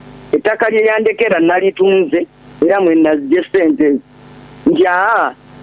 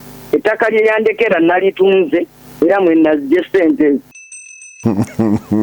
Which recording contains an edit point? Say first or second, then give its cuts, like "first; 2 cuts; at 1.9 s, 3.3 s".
second; 1 cut; at 4.6 s